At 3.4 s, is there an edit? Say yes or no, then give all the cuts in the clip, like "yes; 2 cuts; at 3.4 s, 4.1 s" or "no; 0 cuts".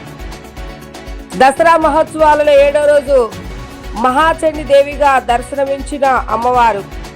no; 1 cut; at 1.3 s